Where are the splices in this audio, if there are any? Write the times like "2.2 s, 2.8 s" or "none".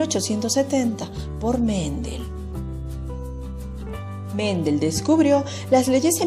5.1 s